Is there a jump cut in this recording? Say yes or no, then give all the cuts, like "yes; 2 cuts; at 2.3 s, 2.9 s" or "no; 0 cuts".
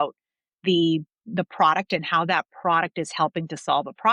no; 0 cuts